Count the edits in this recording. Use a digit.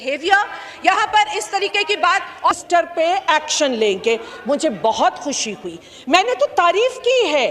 0